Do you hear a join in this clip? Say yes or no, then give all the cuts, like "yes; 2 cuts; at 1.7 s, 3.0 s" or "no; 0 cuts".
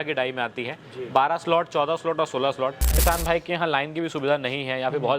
yes; 1 cut; at 3.0 s